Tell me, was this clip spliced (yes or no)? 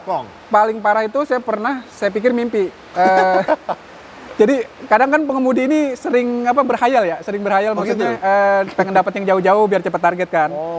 no